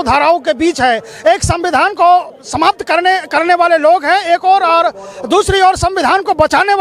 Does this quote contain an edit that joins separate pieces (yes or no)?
no